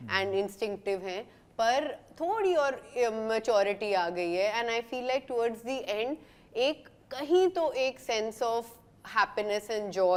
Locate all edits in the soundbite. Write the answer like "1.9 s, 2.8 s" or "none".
none